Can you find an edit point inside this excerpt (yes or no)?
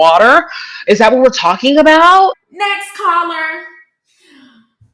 yes